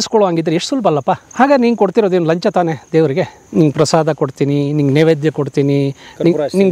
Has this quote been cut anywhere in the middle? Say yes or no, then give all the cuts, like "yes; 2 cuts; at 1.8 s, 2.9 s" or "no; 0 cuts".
yes; 2 cuts; at 1.3 s, 3.4 s